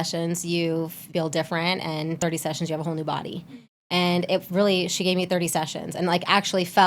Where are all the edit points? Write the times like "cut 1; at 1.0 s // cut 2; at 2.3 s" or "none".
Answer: cut 1; at 1.0 s // cut 2; at 2.2 s